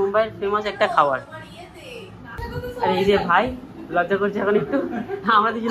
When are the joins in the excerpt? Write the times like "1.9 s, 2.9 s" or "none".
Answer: 2.3 s